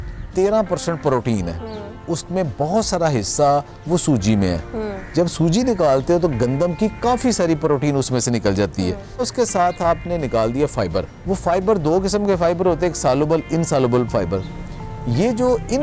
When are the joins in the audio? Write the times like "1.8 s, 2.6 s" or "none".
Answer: 2.0 s, 9.2 s, 11.1 s